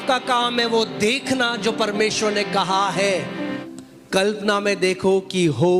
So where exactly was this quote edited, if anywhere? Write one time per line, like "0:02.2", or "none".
0:03.6